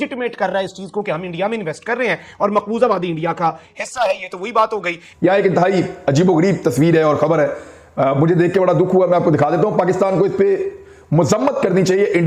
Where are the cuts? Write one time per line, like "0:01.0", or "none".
none

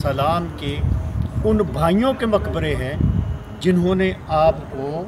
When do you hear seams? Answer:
none

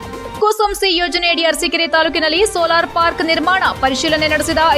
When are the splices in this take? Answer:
none

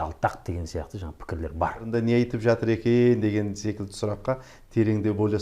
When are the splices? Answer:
0:01.9

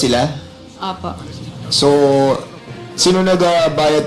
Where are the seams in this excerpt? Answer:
0:01.5

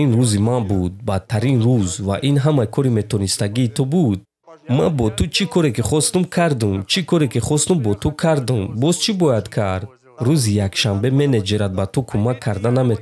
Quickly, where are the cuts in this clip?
none

